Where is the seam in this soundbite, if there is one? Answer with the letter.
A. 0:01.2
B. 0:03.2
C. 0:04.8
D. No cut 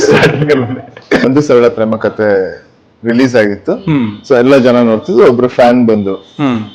A